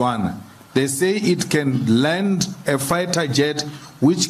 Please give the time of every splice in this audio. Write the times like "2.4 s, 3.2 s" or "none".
none